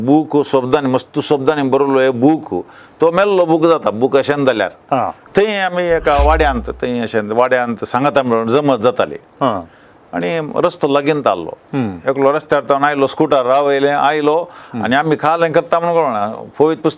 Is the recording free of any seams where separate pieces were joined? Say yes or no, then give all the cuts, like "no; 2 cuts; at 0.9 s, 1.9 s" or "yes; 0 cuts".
no; 1 cut; at 5.2 s